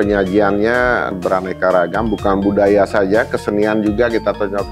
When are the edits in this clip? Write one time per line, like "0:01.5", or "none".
0:01.1